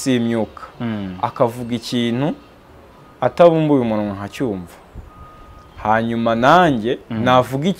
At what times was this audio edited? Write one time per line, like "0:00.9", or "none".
none